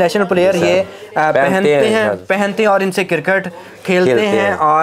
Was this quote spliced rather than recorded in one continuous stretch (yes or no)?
no